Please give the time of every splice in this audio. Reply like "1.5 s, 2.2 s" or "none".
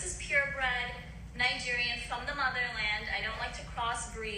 none